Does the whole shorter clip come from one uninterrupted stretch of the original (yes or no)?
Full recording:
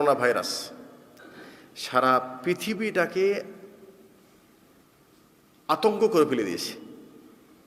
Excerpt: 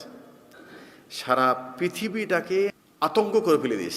no